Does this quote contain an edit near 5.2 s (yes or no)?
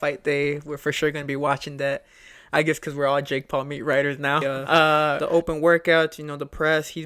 yes